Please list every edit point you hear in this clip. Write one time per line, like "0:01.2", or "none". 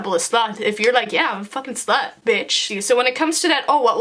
0:02.6